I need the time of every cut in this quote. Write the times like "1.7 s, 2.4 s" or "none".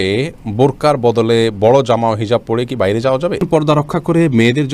3.4 s